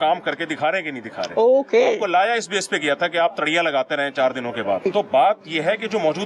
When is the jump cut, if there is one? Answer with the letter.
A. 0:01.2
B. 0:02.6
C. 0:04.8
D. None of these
C